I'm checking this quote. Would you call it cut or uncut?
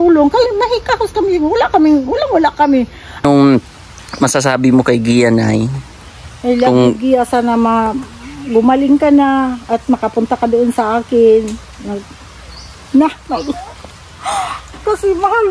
cut